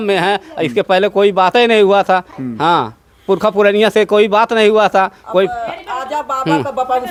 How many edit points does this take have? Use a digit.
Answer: 0